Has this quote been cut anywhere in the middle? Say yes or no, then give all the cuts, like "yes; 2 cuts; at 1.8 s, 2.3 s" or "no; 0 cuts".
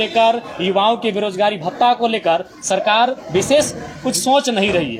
no; 0 cuts